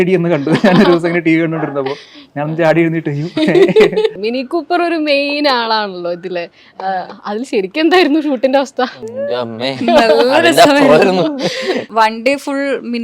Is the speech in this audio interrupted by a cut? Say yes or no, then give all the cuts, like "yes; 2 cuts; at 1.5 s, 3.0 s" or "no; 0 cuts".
yes; 3 cuts; at 4.2 s, 9.1 s, 11.9 s